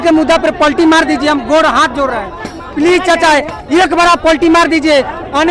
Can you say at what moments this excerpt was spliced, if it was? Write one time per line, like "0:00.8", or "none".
none